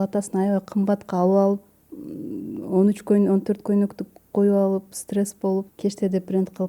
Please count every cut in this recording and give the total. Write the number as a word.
one